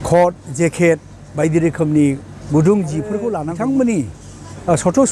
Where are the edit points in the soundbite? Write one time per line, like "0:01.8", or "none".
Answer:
0:03.3